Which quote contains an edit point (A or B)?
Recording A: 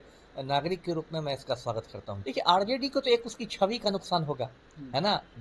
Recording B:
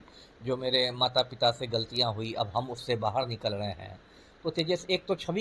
A